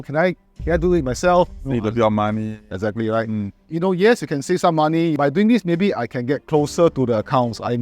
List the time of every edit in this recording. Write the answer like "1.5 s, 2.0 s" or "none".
3.6 s, 5.2 s